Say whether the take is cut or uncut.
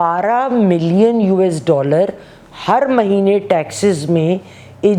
uncut